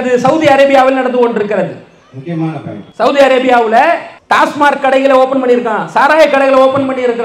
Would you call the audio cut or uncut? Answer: cut